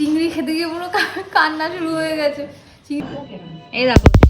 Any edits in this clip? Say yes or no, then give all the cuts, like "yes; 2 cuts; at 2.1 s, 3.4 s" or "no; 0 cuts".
yes; 1 cut; at 3.0 s